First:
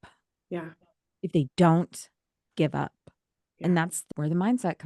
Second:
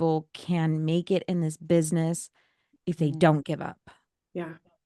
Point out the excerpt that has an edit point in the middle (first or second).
first